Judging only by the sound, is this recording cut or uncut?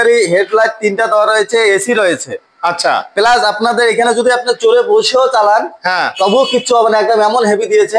uncut